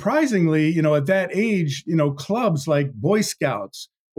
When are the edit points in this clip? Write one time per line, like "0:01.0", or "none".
none